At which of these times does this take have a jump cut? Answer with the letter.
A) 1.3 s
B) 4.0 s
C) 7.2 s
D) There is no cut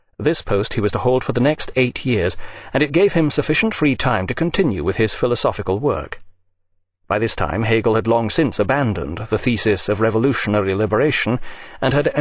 D